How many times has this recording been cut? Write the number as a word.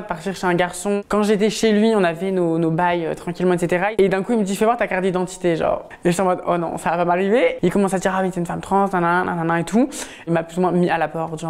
four